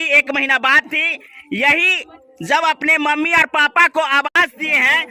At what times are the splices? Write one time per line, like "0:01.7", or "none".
none